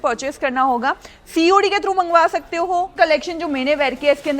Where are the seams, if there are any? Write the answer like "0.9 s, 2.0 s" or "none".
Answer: 2.9 s